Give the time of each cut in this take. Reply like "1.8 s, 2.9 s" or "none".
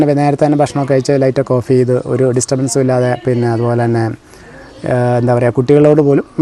none